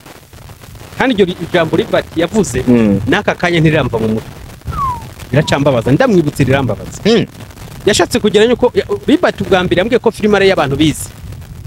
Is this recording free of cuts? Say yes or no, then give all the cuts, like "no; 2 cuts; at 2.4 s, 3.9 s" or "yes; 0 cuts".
yes; 0 cuts